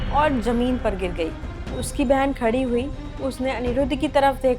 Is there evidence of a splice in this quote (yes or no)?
yes